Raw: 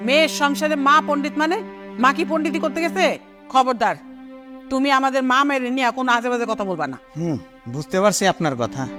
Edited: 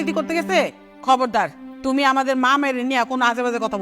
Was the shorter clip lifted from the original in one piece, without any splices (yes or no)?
no